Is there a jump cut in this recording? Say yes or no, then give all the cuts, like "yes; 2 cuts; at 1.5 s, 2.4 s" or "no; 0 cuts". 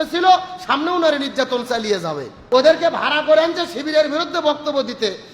yes; 1 cut; at 2.3 s